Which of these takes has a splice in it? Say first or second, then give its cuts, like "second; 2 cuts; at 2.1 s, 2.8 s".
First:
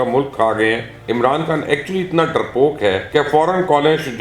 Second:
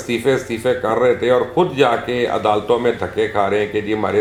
first; 2 cuts; at 0.9 s, 3.0 s